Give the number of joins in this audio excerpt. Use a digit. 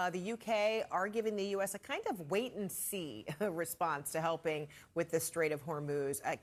0